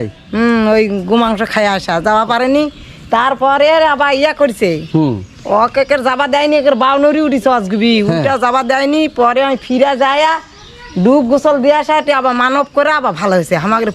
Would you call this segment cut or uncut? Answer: uncut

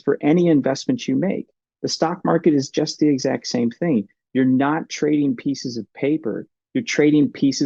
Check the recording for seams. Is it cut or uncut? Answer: uncut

